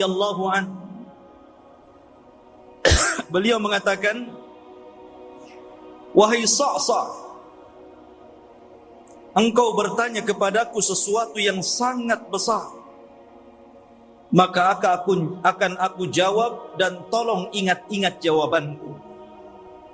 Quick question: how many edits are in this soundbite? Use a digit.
6